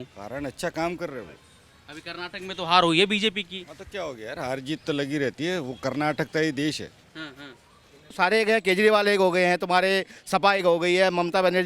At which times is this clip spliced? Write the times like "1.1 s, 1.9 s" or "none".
8.1 s